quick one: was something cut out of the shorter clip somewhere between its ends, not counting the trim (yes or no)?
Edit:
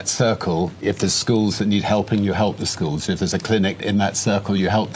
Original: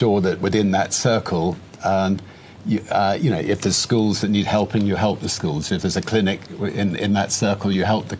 yes